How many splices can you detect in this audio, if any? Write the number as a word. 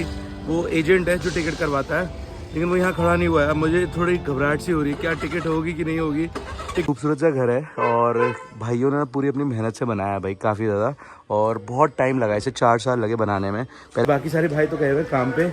two